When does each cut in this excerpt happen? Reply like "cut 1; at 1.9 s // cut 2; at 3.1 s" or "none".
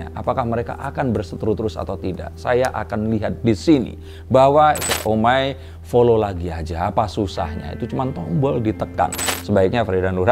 cut 1; at 4.9 s // cut 2; at 9.3 s